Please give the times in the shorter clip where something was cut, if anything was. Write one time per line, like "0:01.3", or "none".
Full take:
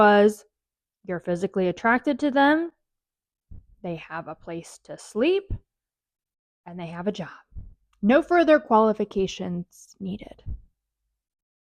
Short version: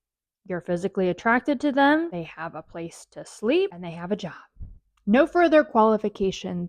0:02.1
0:03.8